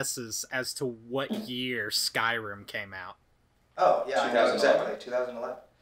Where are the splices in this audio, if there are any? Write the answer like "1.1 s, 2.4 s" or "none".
none